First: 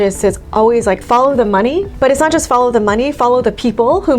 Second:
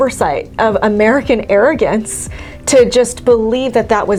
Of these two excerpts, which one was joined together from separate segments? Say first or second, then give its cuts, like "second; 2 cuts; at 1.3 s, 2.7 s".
first; 2 cuts; at 1.0 s, 1.9 s